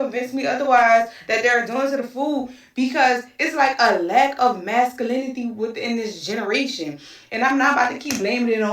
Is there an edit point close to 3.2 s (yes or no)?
yes